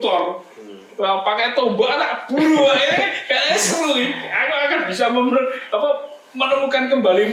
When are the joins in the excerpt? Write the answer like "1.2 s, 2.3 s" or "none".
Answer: none